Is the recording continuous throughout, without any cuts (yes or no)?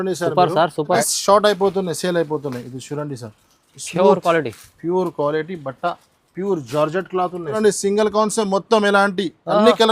no